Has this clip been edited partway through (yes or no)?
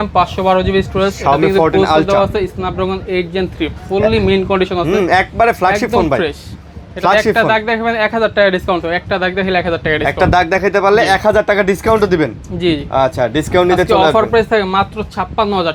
no